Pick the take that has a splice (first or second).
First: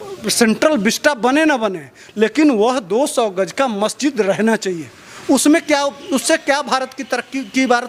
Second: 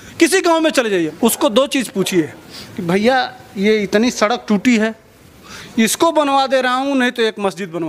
second